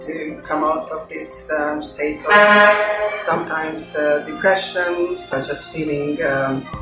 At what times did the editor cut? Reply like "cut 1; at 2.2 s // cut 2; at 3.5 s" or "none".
cut 1; at 5.3 s